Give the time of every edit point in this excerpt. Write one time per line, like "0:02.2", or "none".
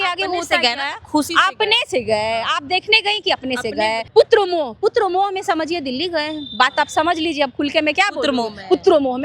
0:04.0